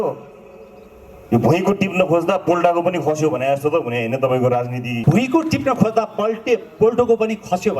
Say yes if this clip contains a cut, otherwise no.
yes